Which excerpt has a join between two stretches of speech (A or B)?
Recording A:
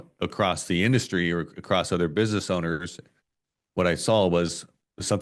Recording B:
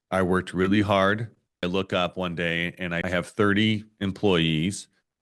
B